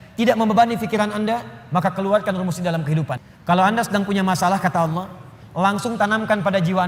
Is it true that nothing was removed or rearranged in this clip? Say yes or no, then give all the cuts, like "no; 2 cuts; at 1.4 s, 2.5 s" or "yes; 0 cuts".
no; 1 cut; at 3.2 s